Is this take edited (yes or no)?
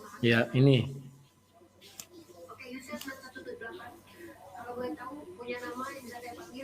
no